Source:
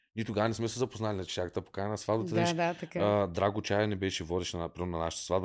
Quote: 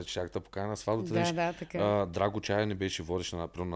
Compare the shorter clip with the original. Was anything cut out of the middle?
no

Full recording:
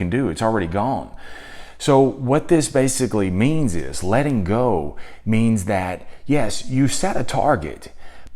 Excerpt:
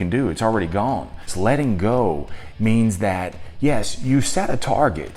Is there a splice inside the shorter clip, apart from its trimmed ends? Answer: yes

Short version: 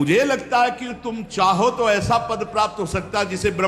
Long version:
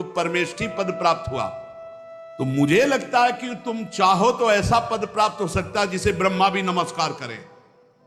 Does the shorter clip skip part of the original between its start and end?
no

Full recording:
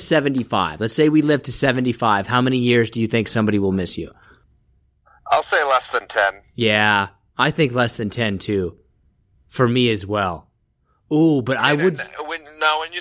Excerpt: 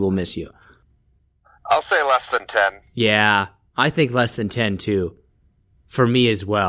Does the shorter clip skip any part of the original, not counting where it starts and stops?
no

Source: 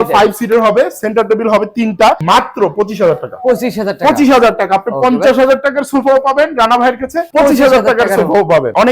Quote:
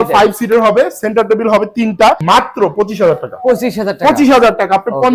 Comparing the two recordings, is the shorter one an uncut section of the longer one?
yes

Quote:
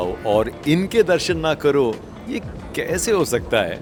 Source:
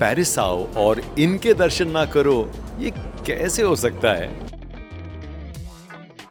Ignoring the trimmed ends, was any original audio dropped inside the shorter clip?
no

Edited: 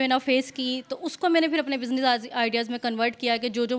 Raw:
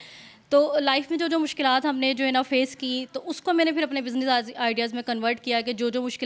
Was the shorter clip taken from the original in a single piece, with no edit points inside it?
yes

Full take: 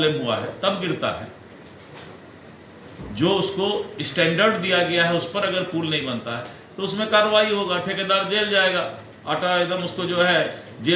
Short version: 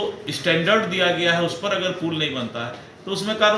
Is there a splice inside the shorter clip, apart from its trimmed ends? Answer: no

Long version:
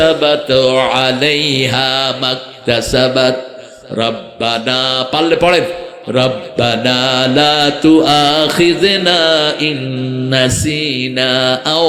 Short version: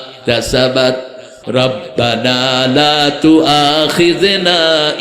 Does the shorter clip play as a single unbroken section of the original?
no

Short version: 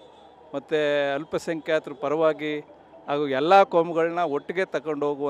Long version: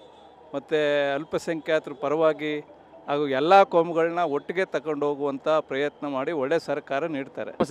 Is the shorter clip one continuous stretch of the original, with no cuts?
yes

